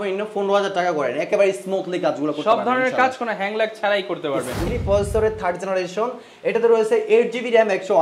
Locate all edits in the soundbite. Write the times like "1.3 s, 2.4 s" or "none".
4.6 s